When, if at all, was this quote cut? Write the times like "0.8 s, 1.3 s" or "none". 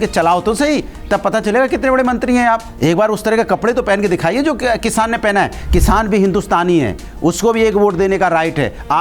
2.7 s